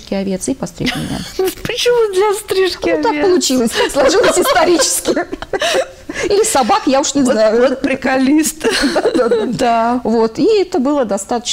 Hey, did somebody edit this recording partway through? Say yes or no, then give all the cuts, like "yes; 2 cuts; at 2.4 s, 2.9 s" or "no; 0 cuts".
no; 0 cuts